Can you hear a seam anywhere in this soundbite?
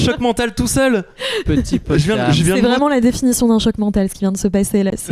no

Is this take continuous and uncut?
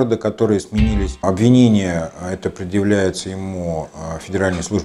no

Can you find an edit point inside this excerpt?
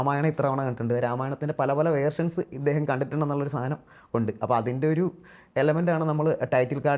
no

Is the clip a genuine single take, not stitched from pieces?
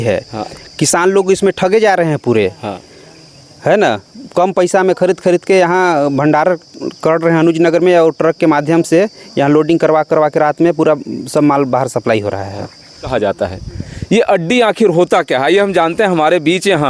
no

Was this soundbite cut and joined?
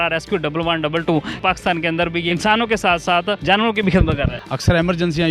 yes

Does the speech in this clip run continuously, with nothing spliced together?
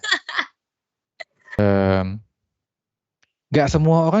no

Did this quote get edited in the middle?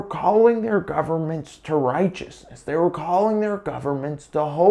no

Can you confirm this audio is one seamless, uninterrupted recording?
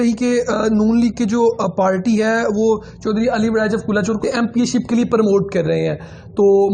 no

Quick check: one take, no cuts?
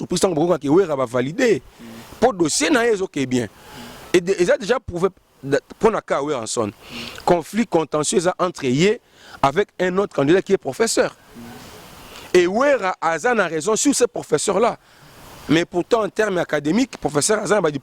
yes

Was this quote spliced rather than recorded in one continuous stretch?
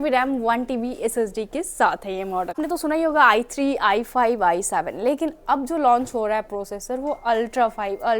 yes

